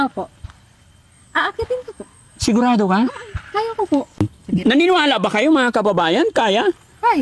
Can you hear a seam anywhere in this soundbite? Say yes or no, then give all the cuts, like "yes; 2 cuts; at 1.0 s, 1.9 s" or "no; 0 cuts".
yes; 1 cut; at 4.4 s